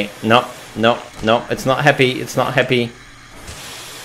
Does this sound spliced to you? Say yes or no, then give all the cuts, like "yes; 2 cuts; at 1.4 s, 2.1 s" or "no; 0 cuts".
no; 0 cuts